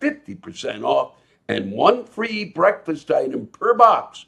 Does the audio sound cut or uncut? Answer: uncut